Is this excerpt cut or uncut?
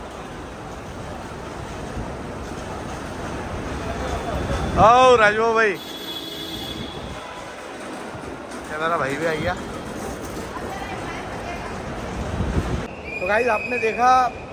uncut